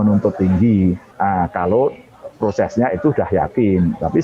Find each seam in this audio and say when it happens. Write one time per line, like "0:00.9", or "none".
0:01.1